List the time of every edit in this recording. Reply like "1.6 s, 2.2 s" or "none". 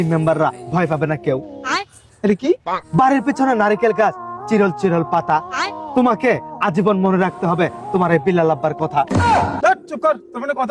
9.5 s